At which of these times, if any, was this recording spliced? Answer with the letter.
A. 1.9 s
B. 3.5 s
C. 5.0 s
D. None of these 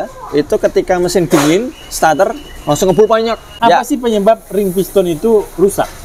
B